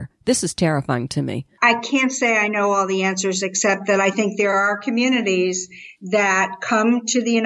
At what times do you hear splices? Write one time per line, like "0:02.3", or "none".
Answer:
0:01.5